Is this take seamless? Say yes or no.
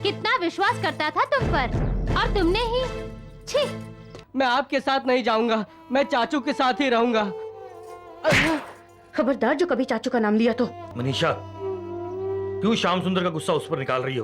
no